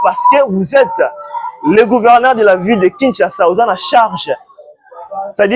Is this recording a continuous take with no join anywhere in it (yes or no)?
yes